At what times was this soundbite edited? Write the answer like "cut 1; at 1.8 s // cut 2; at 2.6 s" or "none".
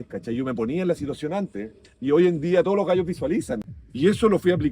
cut 1; at 3.7 s